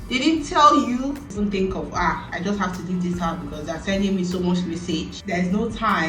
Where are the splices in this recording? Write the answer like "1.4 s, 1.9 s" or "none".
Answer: 0.9 s, 4.9 s